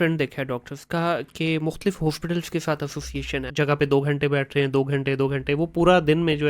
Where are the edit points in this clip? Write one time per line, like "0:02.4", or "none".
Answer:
0:03.4